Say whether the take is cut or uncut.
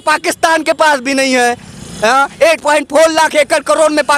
uncut